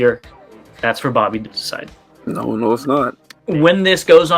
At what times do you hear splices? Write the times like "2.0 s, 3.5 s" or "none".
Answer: 3.3 s